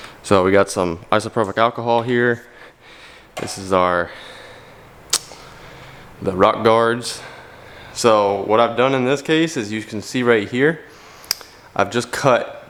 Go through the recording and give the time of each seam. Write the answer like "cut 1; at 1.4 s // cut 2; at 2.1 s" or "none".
none